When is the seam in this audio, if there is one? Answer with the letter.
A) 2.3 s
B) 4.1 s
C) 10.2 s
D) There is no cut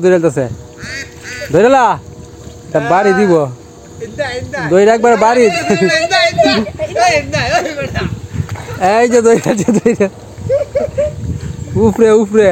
D